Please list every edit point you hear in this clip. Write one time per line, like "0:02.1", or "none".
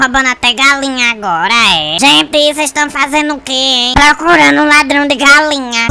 0:01.9